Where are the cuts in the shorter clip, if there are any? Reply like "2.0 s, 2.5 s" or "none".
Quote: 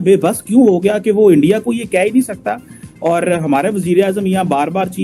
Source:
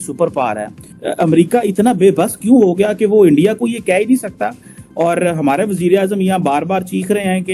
none